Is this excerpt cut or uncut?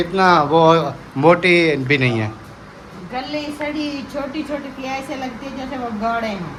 uncut